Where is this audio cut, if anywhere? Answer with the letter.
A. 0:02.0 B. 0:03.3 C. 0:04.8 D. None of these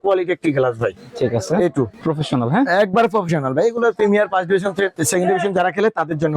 A